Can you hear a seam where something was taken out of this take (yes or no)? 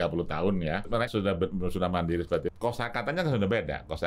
yes